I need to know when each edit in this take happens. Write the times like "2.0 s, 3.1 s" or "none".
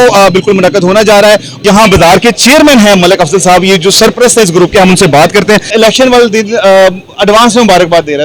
1.5 s, 5.7 s